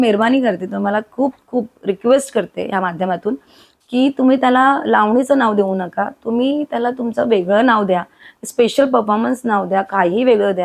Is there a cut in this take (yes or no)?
no